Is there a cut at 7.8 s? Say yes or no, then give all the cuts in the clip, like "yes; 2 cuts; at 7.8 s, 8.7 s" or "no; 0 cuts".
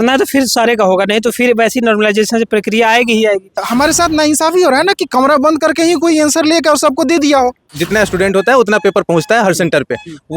yes; 2 cuts; at 3.6 s, 7.8 s